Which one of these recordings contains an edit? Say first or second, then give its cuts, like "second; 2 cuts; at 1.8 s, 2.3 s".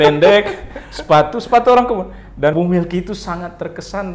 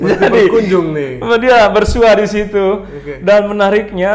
first; 1 cut; at 2.5 s